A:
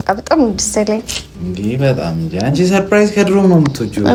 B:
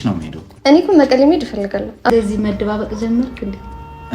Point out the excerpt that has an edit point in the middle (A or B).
B